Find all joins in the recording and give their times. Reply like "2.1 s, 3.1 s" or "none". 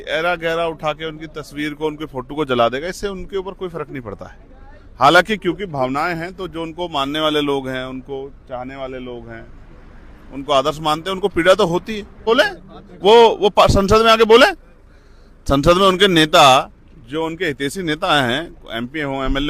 12.2 s